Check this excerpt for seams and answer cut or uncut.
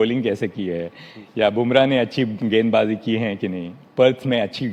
uncut